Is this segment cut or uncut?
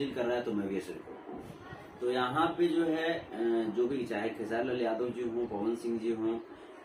uncut